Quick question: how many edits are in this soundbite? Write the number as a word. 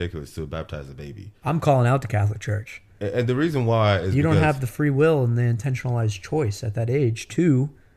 one